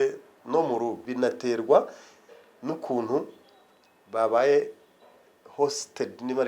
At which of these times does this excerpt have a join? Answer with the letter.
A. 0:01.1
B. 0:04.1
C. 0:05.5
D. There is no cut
A